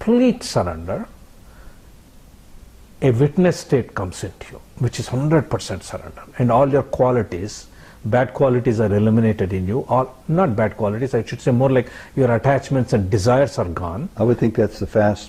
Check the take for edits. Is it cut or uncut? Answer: uncut